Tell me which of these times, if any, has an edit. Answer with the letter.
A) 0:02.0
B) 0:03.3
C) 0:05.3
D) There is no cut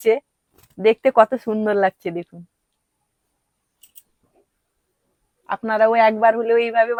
D